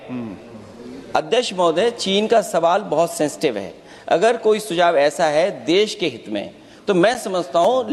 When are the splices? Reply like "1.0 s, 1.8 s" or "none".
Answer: none